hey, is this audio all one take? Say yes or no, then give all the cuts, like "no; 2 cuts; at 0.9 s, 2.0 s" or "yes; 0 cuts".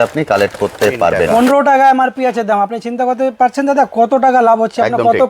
no; 1 cut; at 1.2 s